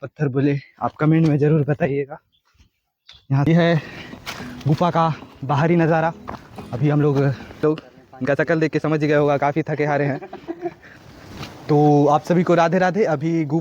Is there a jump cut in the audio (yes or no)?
yes